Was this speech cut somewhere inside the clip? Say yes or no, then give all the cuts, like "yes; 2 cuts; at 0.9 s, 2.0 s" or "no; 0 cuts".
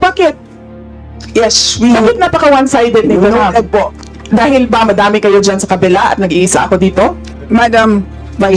yes; 1 cut; at 7.3 s